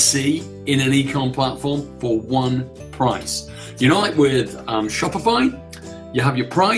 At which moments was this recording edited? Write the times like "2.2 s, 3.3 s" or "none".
none